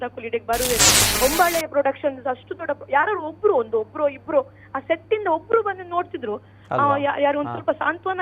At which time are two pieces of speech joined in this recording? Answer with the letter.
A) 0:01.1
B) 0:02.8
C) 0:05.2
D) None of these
A